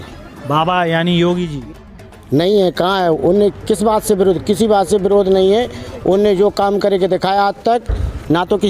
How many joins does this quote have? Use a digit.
1